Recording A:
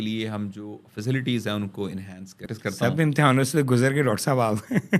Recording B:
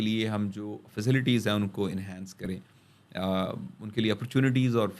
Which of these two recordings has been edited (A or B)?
A